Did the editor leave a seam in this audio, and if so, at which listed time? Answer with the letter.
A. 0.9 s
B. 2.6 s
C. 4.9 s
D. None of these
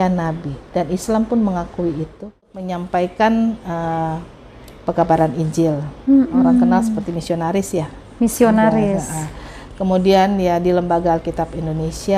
B